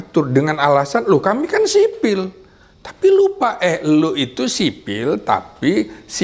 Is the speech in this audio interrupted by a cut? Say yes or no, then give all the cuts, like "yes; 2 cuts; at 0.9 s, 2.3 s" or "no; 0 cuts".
no; 0 cuts